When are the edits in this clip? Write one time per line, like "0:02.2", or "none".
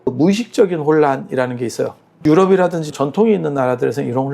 0:02.1